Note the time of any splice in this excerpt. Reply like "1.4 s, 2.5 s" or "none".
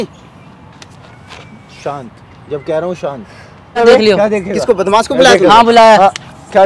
3.8 s